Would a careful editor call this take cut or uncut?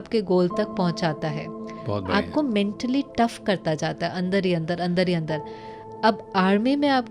uncut